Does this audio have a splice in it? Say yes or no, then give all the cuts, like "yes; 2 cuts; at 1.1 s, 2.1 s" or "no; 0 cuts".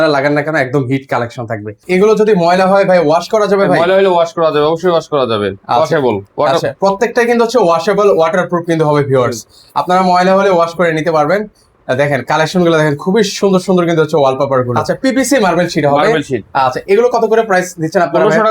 yes; 2 cuts; at 1.8 s, 15.0 s